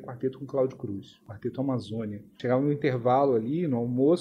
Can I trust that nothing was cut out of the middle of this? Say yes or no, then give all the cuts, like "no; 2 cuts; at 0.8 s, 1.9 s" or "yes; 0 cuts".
no; 2 cuts; at 1.3 s, 2.3 s